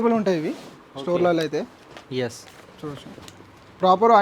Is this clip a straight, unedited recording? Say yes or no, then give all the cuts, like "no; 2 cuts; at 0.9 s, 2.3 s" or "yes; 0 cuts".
yes; 0 cuts